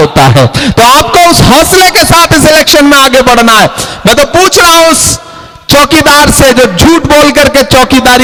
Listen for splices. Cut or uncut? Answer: uncut